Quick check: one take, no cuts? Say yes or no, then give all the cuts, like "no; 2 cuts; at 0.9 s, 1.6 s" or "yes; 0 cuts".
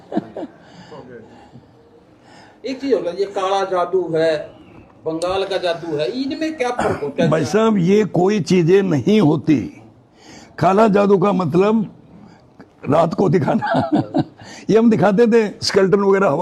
yes; 0 cuts